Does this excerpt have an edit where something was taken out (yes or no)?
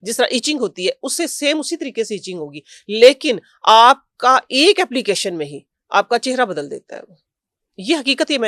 no